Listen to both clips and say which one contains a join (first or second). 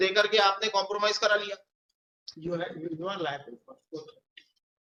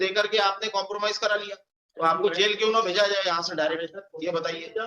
second